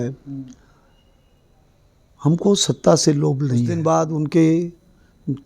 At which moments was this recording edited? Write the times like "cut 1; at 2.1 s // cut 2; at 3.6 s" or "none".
cut 1; at 3.7 s